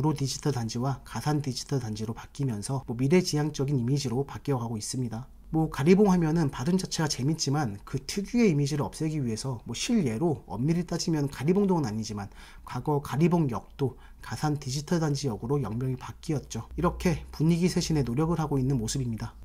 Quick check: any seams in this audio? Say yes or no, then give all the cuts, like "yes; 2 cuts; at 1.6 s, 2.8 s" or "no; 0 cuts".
no; 0 cuts